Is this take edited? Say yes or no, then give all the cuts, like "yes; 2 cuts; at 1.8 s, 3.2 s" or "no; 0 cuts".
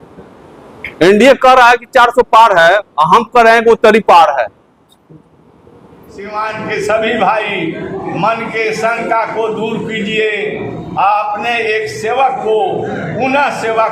yes; 1 cut; at 6.3 s